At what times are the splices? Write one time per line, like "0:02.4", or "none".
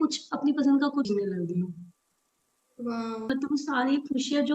0:01.1
0:03.3